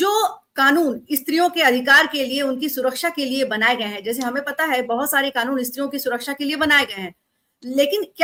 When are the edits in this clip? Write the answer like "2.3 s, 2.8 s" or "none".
none